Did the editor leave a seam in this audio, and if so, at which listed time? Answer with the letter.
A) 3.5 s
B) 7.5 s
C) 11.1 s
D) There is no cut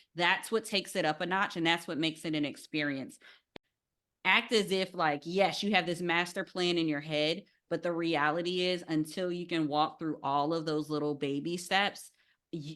A